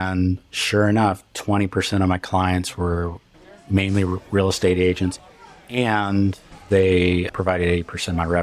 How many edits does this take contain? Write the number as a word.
one